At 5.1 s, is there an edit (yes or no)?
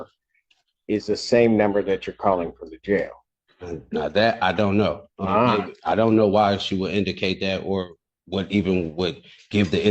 no